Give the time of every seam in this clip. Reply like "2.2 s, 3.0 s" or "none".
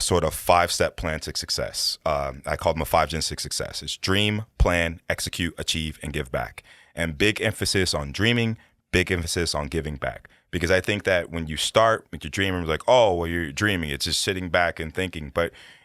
none